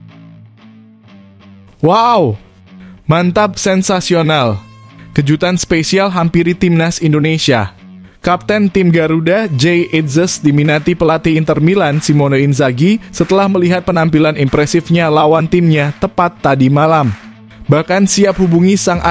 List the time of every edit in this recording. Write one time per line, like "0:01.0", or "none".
none